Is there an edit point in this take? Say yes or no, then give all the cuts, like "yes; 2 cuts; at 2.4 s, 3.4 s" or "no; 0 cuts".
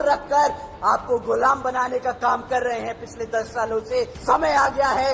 yes; 1 cut; at 4.1 s